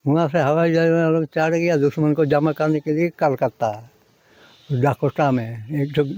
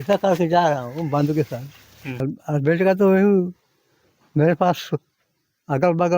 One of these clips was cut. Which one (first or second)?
second